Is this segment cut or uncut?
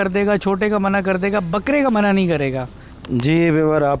uncut